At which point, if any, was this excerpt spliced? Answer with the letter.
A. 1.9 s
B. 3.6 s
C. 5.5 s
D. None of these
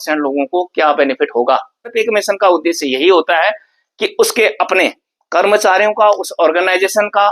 A